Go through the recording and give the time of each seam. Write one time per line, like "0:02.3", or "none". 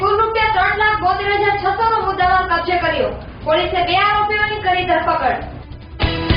none